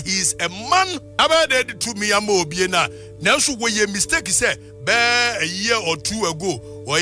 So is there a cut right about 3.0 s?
no; 1 cut; at 1.1 s

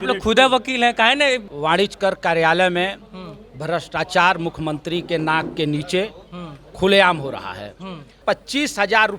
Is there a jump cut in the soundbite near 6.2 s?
no; 2 cuts; at 1.5 s, 8.1 s

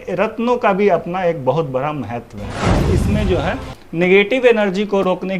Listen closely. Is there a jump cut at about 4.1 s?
no; 1 cut; at 2.8 s

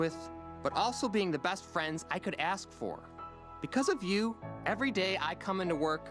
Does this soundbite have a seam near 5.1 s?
no; 0 cuts

